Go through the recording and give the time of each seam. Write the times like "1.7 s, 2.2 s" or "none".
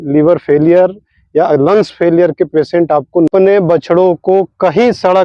3.3 s